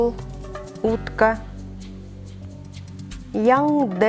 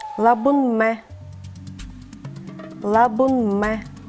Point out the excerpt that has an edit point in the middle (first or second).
second